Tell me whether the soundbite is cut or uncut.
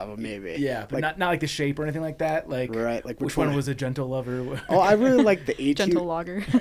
uncut